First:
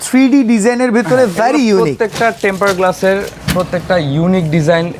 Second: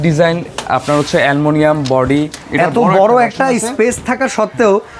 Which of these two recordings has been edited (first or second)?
second